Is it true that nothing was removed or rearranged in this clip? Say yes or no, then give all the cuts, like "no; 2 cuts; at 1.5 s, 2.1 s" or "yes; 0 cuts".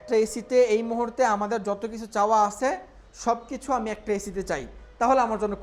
yes; 0 cuts